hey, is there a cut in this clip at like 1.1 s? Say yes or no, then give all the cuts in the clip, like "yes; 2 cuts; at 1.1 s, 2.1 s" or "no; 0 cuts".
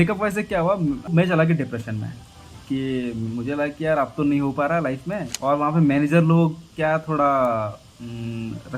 yes; 2 cuts; at 1.1 s, 5.3 s